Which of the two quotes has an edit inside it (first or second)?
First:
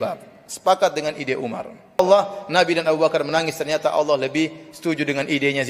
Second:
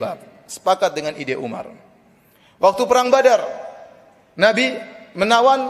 first